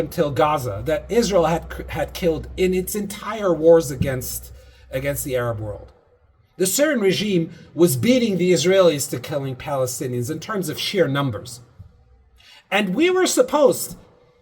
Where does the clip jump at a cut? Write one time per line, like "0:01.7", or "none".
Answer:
none

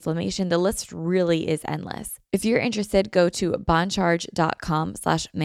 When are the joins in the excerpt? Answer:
0:02.1

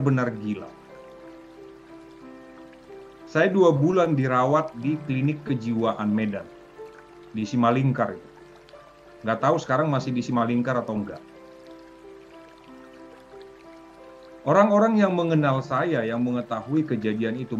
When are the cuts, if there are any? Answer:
none

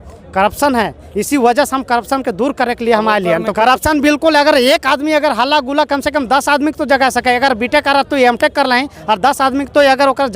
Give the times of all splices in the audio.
0:03.5

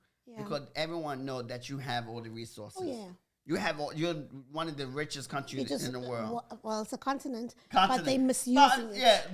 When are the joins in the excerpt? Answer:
none

